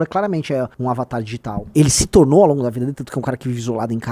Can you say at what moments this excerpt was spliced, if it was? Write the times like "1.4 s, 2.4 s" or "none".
1.0 s